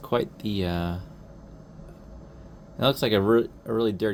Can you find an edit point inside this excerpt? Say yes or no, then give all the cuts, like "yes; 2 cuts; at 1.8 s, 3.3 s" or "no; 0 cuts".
no; 0 cuts